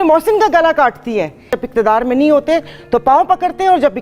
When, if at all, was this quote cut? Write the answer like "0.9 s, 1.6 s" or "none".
1.6 s